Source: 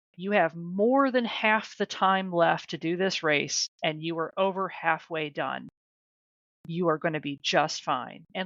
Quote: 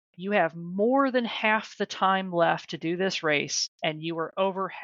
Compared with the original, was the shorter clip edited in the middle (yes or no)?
no